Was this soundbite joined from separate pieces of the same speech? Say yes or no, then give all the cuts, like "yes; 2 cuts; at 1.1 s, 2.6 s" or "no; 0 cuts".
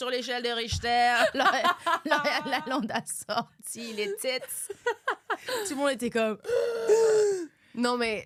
no; 0 cuts